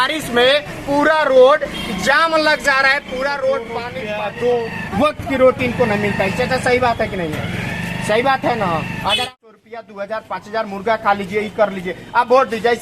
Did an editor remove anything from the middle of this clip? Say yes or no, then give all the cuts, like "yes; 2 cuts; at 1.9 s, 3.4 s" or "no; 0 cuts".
yes; 2 cuts; at 3.9 s, 9.4 s